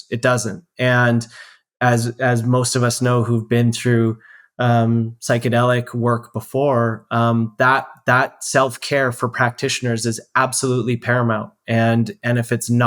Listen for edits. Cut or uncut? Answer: uncut